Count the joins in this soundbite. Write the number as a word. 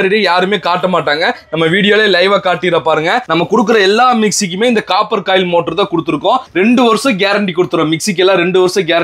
zero